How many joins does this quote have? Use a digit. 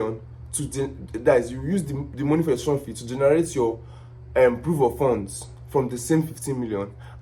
0